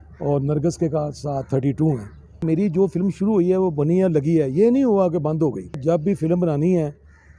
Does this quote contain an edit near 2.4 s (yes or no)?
yes